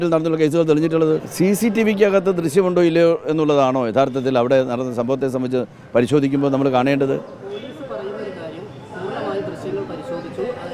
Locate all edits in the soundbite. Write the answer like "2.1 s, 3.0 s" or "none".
1.3 s